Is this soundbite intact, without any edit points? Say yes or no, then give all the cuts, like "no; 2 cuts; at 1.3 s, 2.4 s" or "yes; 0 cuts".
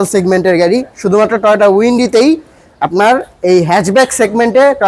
yes; 0 cuts